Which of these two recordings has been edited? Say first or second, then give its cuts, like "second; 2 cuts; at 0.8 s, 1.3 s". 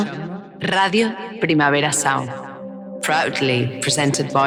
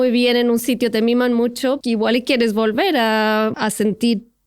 second; 2 cuts; at 1.8 s, 3.6 s